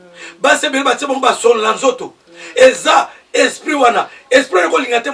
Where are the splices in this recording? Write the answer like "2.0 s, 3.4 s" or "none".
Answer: none